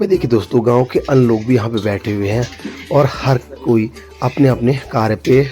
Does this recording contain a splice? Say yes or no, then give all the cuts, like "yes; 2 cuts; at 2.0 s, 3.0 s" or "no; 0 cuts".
no; 0 cuts